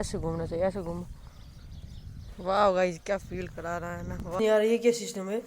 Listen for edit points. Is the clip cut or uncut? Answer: cut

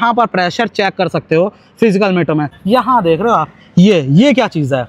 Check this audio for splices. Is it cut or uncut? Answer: cut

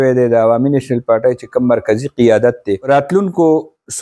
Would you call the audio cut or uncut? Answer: cut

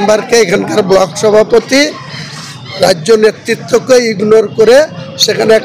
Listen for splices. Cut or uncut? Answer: uncut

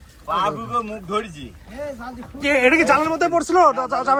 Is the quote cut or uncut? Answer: uncut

